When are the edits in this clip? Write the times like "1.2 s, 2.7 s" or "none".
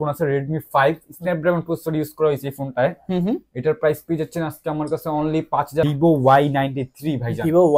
5.9 s